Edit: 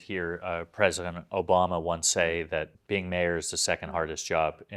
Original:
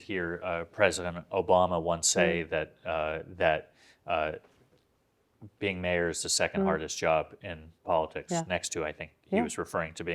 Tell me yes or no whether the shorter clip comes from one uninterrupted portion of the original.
no